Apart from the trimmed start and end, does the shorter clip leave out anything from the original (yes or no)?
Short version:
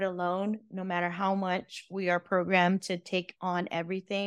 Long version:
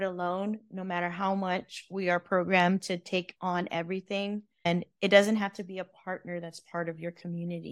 no